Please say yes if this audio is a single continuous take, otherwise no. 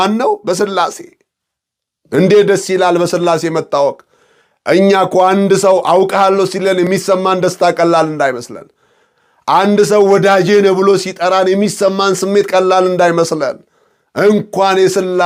yes